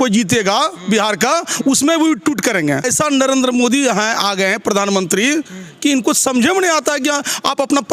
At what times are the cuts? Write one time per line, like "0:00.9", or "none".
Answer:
0:02.9

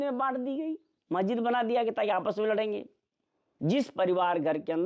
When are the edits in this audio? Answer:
0:03.4

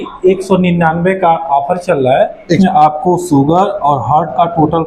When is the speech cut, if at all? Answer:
0:02.6

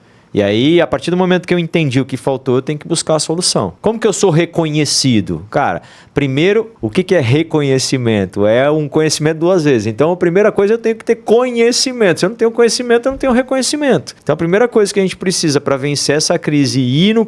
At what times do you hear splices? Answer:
0:03.7
0:06.7
0:14.1

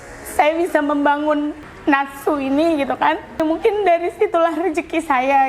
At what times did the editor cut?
0:01.7
0:03.4

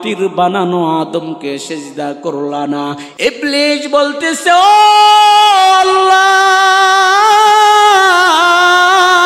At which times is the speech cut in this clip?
0:03.1

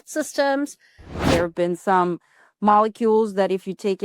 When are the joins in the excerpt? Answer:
0:01.3

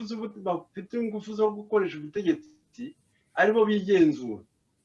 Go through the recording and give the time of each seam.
none

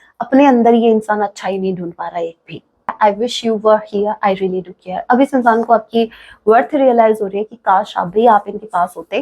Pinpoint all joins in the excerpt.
0:02.9

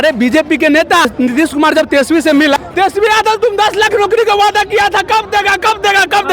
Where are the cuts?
0:01.1
0:02.6

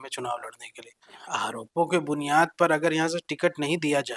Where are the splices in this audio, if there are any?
0:01.2

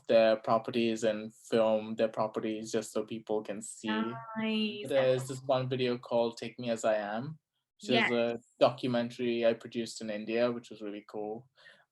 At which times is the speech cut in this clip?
0:04.8

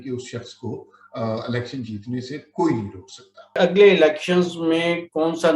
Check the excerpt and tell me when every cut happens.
0:03.6

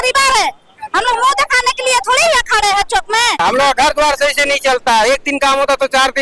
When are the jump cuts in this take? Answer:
0:03.4

